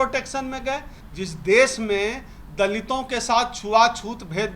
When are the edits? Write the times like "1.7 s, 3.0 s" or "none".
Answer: 1.0 s